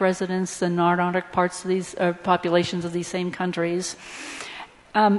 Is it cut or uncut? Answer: uncut